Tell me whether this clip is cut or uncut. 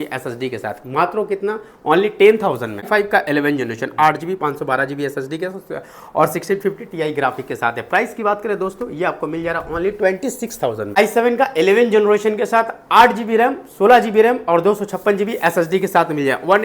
cut